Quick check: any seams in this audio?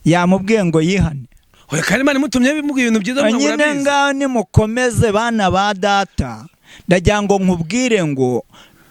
no; 0 cuts

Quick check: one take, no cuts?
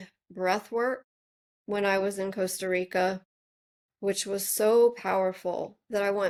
yes; 0 cuts

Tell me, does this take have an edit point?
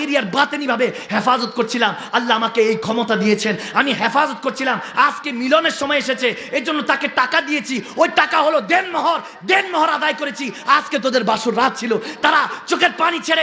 no; 0 cuts

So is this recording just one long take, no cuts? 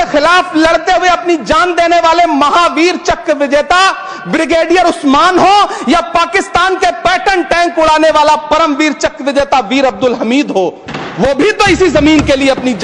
yes; 0 cuts

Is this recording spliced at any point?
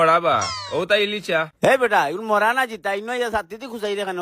no; 0 cuts

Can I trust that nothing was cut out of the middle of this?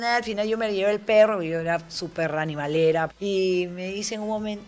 no; 1 cut; at 3.1 s

